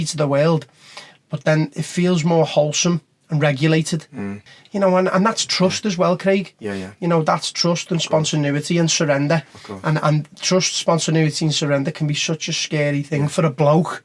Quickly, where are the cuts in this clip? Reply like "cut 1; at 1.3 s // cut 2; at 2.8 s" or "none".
cut 1; at 4.3 s